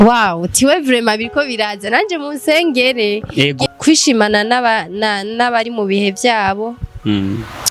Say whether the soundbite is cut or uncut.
cut